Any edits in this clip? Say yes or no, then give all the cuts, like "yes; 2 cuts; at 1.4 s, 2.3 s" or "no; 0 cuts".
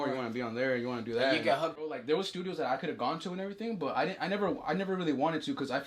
yes; 1 cut; at 1.8 s